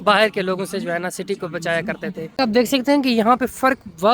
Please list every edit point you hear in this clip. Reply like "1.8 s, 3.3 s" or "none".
2.2 s